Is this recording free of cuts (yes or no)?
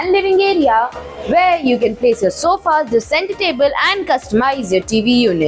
yes